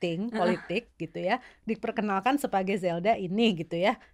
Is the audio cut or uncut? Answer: uncut